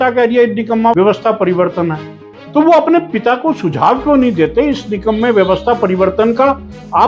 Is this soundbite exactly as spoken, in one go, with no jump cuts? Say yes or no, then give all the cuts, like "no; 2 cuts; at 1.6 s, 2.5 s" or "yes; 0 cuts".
no; 1 cut; at 0.9 s